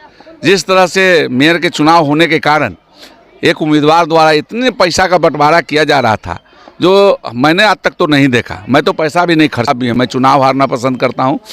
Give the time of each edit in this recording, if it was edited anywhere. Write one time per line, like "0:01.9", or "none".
0:09.7